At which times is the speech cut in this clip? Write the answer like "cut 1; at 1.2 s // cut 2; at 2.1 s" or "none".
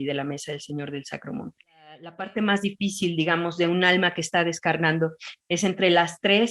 cut 1; at 2.1 s

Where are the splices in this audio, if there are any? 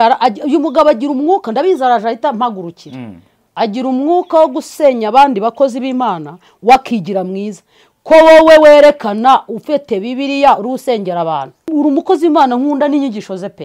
cut 1; at 11.6 s

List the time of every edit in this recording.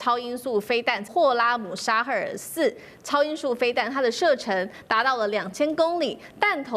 cut 1; at 1.1 s

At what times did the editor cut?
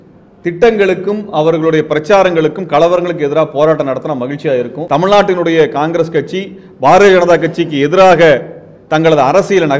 cut 1; at 4.8 s

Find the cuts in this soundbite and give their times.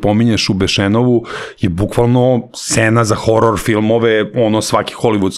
none

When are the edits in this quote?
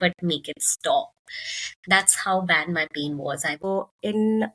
cut 1; at 3.6 s

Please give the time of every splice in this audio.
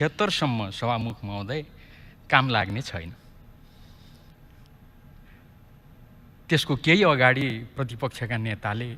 none

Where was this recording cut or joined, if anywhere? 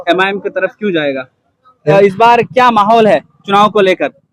cut 1; at 1.9 s

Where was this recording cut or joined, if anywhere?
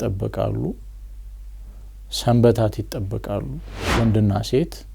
cut 1; at 3.7 s

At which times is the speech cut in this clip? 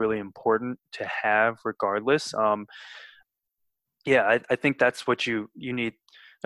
cut 1; at 3.2 s

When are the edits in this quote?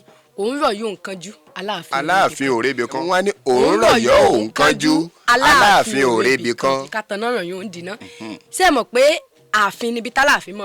cut 1; at 3.0 s // cut 2; at 6.9 s

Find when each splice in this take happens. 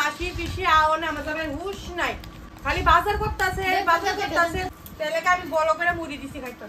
cut 1; at 4.8 s

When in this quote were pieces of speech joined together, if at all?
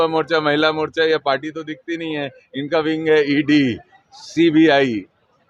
none

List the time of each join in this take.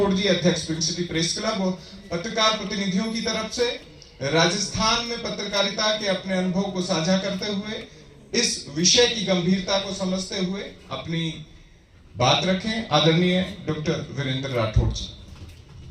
none

